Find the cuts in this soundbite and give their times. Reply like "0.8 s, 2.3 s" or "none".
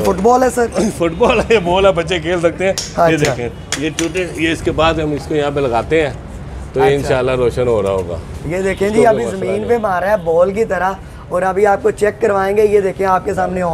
none